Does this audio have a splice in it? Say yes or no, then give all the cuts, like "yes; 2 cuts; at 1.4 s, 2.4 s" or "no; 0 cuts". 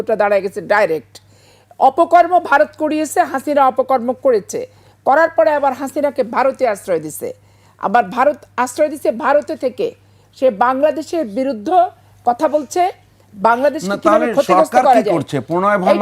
no; 0 cuts